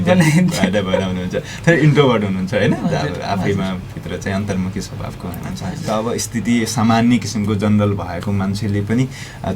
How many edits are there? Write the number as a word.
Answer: one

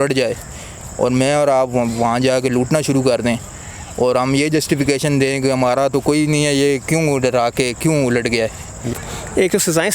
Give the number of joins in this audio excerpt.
one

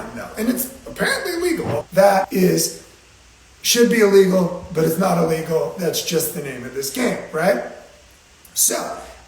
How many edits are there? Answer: one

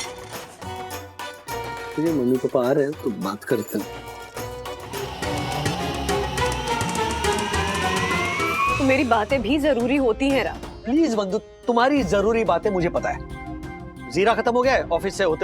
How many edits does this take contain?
two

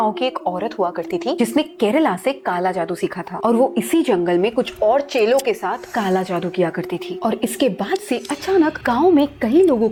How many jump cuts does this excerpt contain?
zero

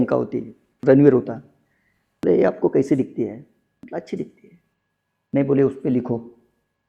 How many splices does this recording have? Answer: zero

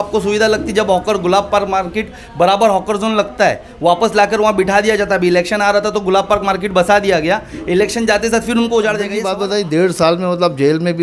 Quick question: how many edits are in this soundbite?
one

